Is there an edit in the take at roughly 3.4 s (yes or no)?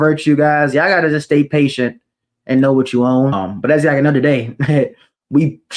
yes